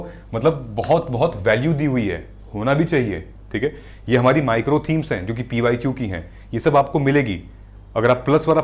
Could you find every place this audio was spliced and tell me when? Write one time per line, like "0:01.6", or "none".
none